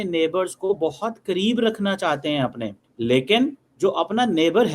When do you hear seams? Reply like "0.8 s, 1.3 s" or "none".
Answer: 3.6 s